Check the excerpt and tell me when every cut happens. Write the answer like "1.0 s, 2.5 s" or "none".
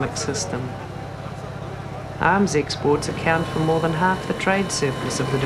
none

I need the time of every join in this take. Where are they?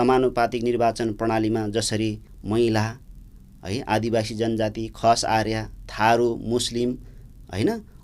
2.3 s

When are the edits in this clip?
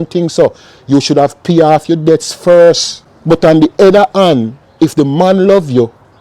3.1 s

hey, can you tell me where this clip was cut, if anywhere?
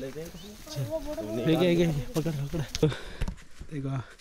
2.8 s

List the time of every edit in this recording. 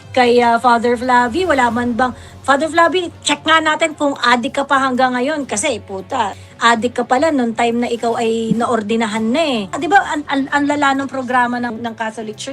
6.4 s, 9.8 s, 11.7 s

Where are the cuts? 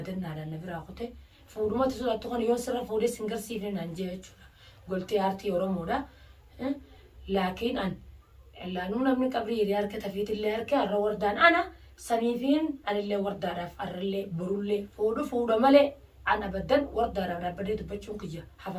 1.4 s, 14.9 s

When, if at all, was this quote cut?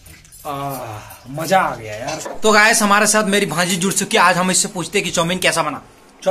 2.3 s

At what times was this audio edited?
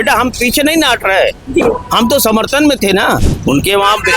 3.2 s

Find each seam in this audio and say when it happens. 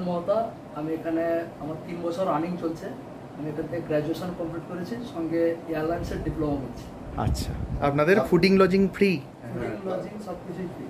7.8 s

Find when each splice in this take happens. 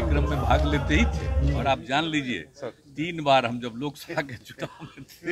1.6 s

